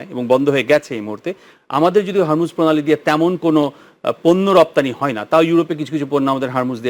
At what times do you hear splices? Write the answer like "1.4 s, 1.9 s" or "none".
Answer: none